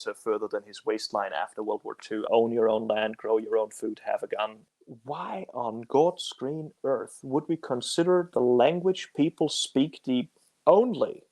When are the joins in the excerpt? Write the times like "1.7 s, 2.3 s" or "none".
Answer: 2.2 s, 4.6 s